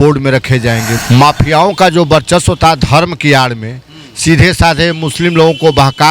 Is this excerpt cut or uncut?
cut